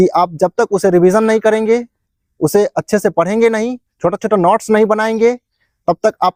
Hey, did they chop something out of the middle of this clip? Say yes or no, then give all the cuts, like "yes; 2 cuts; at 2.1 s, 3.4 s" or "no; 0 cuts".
no; 0 cuts